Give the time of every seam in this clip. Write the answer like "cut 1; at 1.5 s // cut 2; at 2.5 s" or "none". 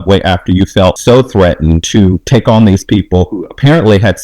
cut 1; at 1.0 s // cut 2; at 1.8 s